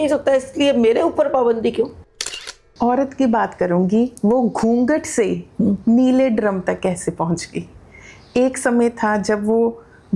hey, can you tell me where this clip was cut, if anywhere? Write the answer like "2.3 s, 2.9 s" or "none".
2.6 s